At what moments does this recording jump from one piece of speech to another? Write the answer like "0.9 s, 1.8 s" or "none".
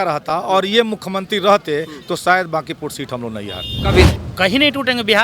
4.2 s